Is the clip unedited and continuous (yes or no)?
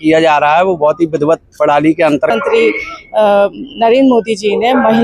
no